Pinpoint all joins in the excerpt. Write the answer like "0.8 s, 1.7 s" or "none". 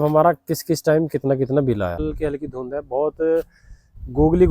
2.0 s